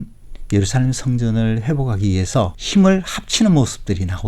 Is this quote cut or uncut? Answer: cut